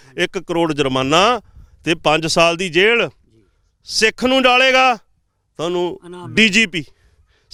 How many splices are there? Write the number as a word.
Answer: zero